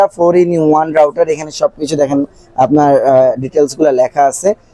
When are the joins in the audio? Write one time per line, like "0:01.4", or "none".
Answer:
none